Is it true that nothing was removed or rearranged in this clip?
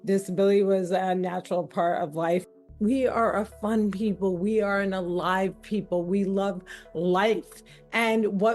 no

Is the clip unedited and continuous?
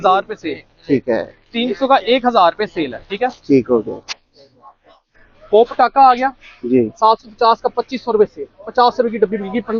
yes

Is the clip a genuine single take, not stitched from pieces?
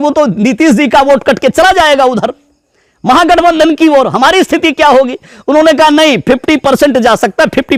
yes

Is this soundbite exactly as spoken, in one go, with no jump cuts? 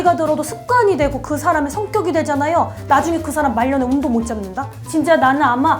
no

